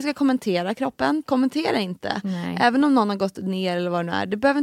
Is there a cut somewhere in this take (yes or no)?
yes